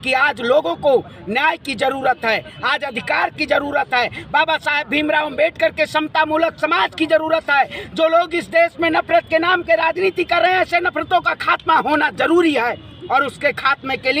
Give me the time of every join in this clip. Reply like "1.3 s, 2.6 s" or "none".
none